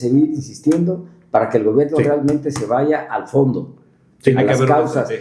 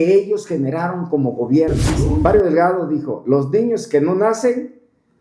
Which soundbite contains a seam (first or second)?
second